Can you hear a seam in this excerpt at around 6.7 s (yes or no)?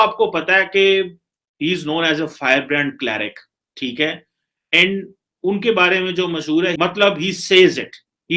yes